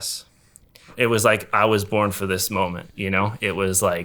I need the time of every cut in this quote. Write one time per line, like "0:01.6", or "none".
0:00.9